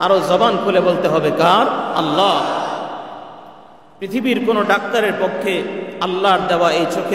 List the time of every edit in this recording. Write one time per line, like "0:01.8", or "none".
none

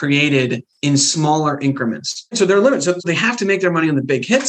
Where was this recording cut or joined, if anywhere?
0:02.3

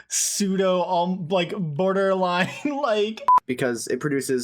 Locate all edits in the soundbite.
0:03.3

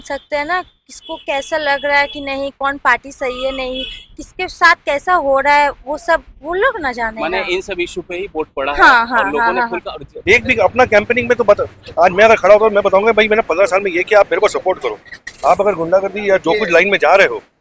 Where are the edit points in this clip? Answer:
0:10.1

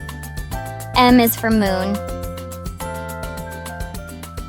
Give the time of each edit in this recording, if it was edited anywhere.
0:00.9
0:02.0
0:03.5

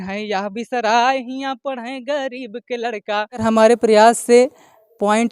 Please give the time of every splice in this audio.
0:03.4

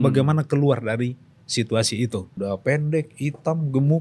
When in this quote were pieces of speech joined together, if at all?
0:02.3

